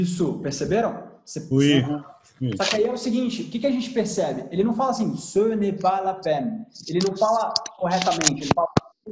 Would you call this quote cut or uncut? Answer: uncut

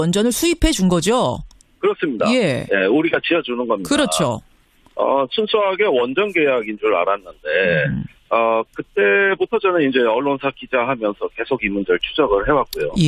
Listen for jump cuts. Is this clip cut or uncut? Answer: uncut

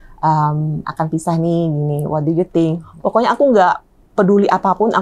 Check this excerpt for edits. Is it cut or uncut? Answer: cut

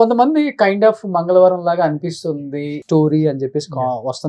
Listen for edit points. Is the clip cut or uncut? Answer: cut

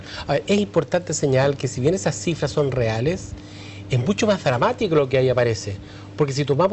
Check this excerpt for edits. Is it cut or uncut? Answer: cut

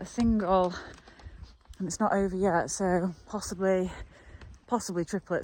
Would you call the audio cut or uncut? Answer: uncut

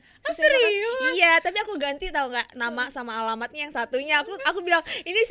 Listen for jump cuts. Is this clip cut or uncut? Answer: uncut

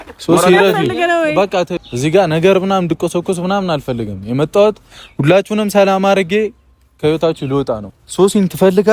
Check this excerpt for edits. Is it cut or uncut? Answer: cut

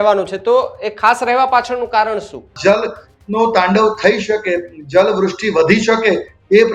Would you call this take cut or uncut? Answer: cut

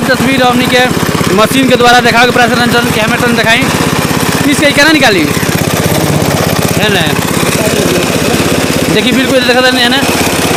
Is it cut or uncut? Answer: uncut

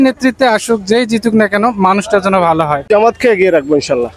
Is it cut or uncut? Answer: cut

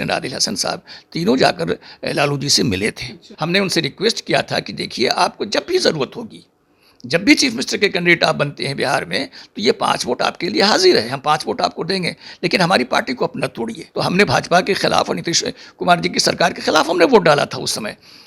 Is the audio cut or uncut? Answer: cut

